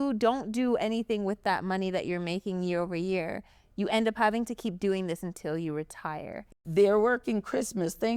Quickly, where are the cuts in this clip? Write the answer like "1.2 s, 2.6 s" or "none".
6.4 s